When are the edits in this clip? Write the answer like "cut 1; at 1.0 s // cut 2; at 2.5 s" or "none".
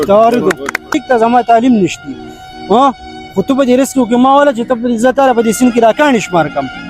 cut 1; at 1.0 s